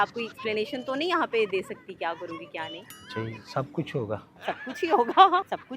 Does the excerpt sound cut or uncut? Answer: cut